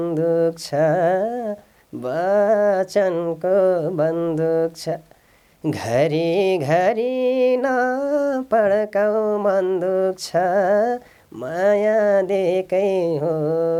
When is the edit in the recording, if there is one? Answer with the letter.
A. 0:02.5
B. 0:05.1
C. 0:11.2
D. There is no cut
D